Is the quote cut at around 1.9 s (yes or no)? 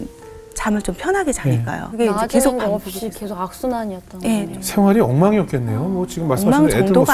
yes